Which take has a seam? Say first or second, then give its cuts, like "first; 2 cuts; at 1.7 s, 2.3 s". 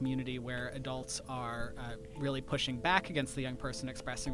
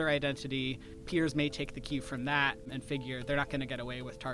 second; 2 cuts; at 1.0 s, 2.7 s